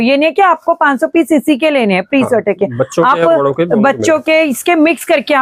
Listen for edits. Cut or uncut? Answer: uncut